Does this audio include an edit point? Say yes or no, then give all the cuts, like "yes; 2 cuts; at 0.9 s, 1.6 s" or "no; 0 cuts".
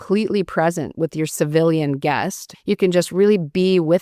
yes; 1 cut; at 2.4 s